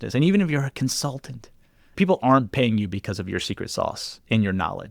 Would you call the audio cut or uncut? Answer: cut